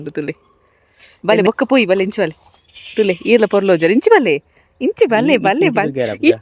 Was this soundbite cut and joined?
yes; 1 cut; at 1.3 s

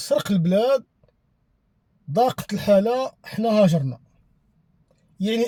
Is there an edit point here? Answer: no; 0 cuts

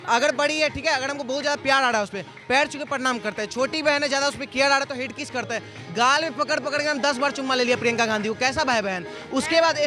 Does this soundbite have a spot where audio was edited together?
no; 0 cuts

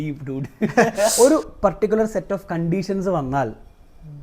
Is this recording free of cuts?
no; 1 cut; at 1.1 s

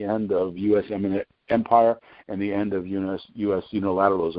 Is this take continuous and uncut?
yes; 0 cuts

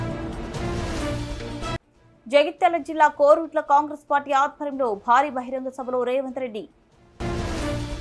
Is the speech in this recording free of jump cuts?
no; 1 cut; at 1.1 s

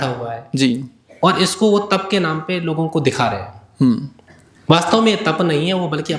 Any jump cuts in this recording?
no; 0 cuts

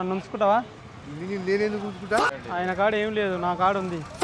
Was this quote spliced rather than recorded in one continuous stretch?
yes; 1 cut; at 2.2 s

